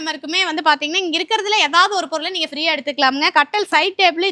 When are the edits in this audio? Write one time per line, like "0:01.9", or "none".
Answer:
none